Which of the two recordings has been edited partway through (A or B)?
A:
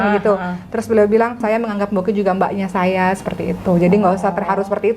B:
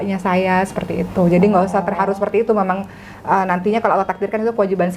A